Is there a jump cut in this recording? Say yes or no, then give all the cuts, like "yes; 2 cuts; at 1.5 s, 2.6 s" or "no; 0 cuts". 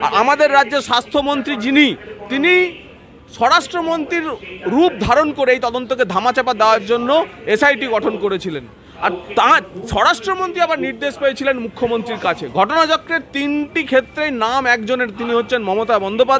no; 0 cuts